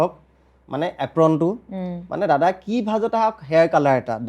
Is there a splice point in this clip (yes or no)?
no